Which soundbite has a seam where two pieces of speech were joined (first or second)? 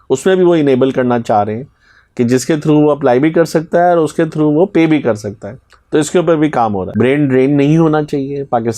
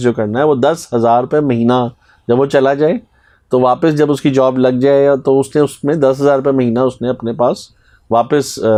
first